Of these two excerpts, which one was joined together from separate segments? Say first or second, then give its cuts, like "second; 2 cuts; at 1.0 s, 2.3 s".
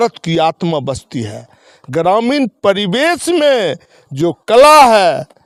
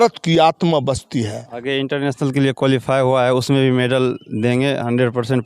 second; 1 cut; at 1.5 s